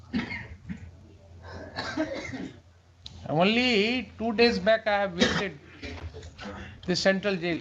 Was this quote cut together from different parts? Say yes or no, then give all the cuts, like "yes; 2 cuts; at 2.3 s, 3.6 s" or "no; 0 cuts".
no; 0 cuts